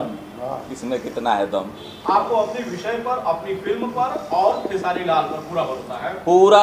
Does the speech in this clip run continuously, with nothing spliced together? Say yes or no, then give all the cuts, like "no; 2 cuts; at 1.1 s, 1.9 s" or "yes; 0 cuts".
yes; 0 cuts